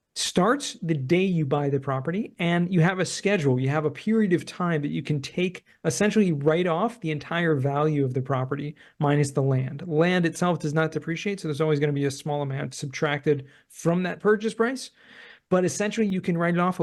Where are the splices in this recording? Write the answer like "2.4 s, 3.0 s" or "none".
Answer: none